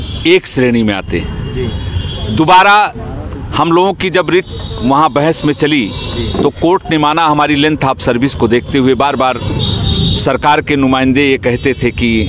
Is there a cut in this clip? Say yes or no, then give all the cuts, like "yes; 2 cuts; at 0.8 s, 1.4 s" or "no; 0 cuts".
no; 0 cuts